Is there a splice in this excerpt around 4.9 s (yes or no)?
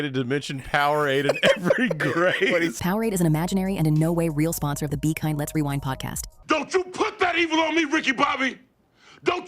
no